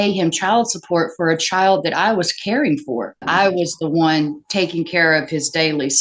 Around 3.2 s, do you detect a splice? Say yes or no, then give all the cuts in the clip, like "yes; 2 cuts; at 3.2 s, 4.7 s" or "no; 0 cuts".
yes; 1 cut; at 3.2 s